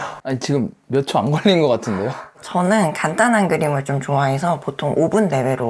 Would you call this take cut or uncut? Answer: uncut